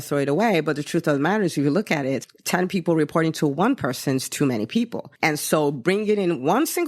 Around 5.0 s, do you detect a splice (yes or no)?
yes